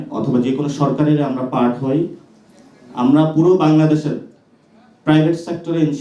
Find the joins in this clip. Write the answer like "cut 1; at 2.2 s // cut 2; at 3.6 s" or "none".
none